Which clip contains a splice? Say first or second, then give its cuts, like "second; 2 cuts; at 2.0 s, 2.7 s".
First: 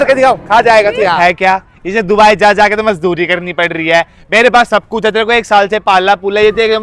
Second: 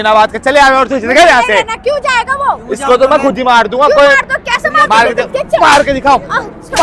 first; 1 cut; at 1.2 s